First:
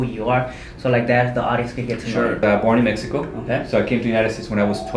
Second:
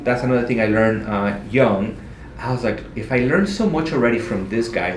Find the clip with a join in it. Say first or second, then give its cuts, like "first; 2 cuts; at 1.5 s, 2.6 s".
first; 1 cut; at 2.4 s